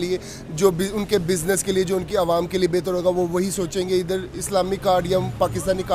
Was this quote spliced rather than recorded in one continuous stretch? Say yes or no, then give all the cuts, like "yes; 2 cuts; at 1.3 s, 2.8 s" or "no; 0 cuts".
no; 0 cuts